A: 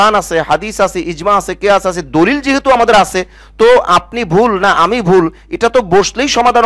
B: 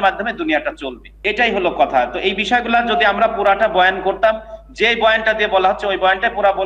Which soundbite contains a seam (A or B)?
B